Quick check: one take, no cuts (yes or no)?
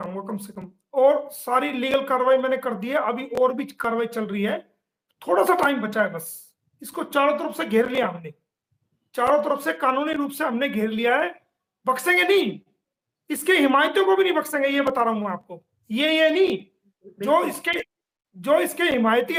yes